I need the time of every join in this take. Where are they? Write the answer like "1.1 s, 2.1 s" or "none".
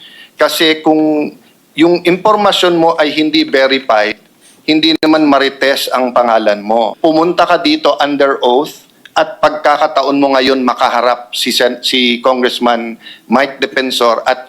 6.9 s